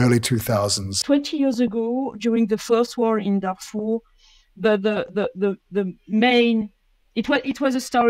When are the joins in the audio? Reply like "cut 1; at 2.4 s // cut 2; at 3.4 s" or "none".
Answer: cut 1; at 1.0 s